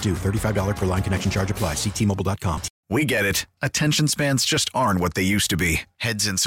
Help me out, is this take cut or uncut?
cut